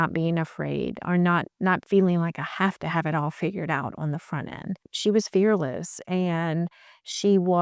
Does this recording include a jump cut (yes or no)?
yes